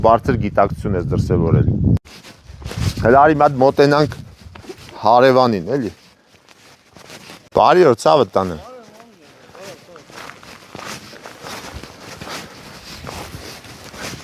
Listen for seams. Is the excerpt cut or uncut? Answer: cut